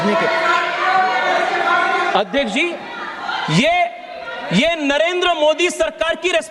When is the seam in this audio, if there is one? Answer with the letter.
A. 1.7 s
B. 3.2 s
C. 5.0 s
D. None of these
D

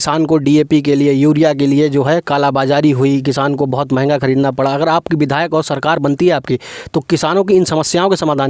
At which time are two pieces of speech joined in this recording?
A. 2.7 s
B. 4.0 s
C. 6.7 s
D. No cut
D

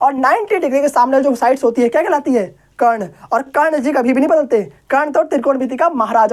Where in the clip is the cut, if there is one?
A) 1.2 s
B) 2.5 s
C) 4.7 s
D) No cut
D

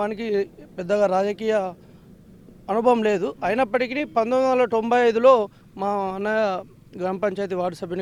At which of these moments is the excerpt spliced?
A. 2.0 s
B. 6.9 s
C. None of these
C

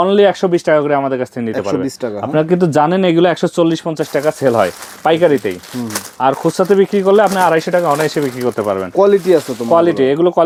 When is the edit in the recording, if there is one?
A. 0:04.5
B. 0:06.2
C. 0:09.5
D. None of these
D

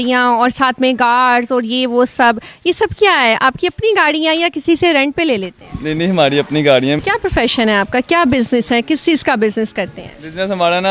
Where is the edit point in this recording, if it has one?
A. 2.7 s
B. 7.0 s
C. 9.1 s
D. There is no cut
B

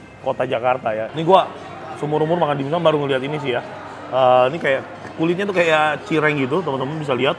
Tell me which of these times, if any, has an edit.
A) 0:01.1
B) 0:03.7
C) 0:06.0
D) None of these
A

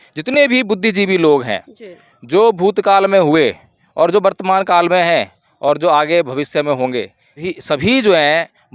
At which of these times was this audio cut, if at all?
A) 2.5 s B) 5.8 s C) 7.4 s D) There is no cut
C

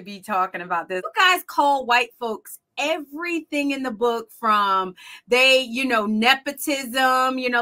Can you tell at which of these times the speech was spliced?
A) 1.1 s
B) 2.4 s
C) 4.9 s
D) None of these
A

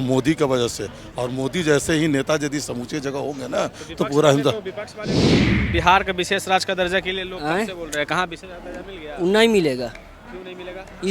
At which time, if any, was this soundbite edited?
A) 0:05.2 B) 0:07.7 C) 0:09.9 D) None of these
A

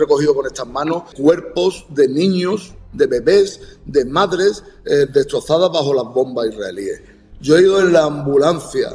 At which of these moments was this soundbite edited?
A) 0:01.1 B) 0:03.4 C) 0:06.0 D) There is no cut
A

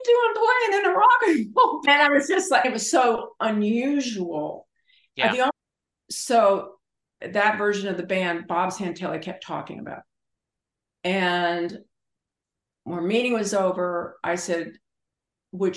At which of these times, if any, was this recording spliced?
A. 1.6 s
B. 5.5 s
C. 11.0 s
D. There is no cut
B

